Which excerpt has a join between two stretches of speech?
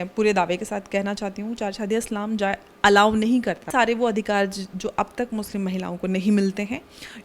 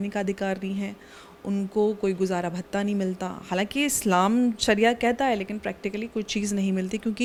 first; 1 cut; at 3.7 s

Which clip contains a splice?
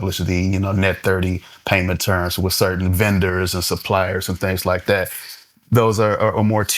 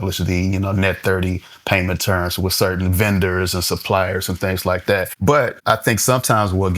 second; 1 cut; at 5.5 s

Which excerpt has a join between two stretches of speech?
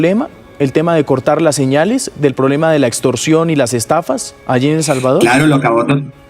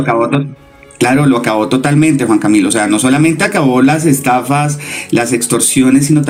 first; 1 cut; at 4.3 s

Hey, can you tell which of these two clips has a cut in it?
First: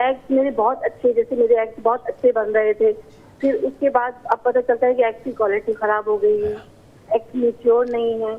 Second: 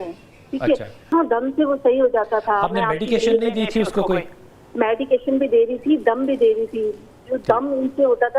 second; 1 cut; at 0.9 s

